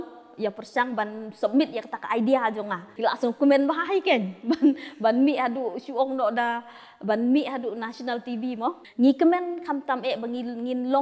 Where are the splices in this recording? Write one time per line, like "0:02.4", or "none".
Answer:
0:02.8
0:08.8